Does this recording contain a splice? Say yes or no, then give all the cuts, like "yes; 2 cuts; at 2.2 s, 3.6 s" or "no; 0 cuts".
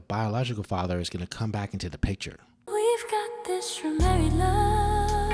yes; 1 cut; at 2.5 s